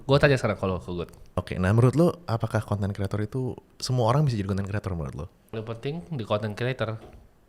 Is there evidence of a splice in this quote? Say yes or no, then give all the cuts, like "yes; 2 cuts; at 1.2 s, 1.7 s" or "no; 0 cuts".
yes; 2 cuts; at 1.4 s, 5.6 s